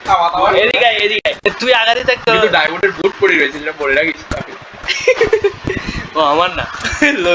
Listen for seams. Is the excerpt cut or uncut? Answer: uncut